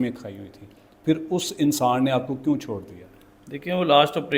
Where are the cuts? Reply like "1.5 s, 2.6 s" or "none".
none